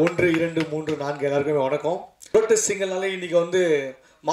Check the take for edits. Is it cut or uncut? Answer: cut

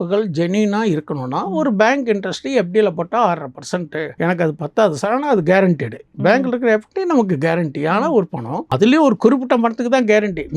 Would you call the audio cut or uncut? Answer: cut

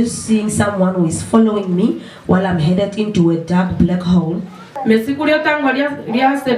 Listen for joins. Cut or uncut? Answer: cut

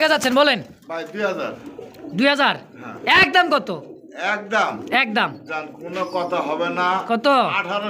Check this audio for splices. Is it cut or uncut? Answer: uncut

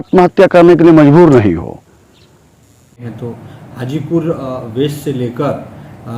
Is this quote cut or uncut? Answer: cut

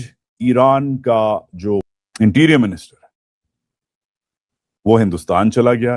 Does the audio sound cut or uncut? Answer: cut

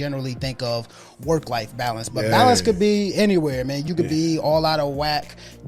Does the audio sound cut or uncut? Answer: cut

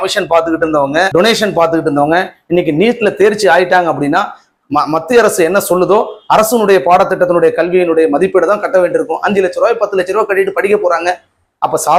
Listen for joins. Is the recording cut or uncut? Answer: uncut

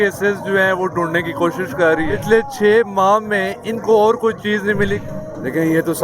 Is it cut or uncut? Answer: cut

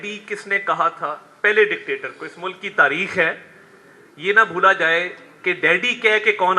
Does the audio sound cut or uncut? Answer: uncut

